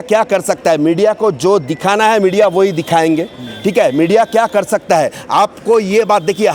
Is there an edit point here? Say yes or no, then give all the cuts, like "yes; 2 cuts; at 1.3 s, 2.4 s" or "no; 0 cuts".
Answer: no; 0 cuts